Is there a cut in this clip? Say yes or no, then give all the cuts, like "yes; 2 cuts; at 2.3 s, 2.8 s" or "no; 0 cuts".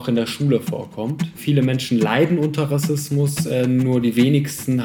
yes; 1 cut; at 1.4 s